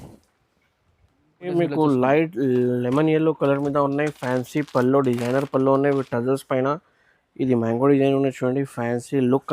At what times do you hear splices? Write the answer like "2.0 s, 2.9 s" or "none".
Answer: 1.5 s

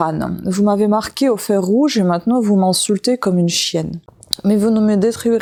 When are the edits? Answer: none

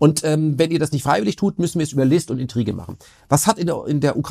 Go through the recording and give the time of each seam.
none

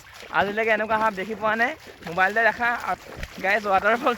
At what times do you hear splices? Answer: 3.0 s

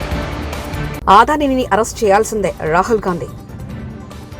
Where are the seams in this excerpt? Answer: 1.0 s

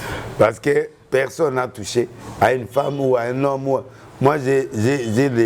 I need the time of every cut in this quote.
none

